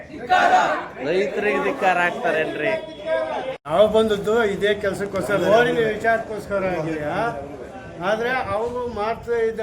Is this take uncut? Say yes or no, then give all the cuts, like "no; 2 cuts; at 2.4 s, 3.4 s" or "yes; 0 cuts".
no; 1 cut; at 3.6 s